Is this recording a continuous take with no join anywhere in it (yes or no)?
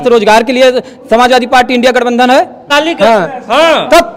no